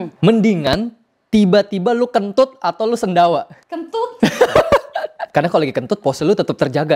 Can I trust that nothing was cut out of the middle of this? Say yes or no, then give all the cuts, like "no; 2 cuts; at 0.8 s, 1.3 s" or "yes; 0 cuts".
yes; 0 cuts